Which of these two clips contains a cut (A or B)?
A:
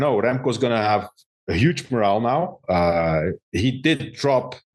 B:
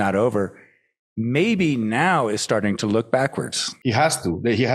B